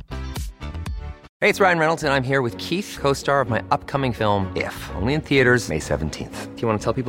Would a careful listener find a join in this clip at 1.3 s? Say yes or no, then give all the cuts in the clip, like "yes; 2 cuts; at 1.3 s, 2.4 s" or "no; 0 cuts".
yes; 1 cut; at 1.3 s